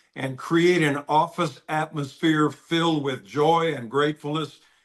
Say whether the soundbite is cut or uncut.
uncut